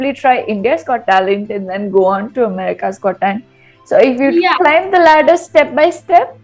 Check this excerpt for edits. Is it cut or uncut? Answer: uncut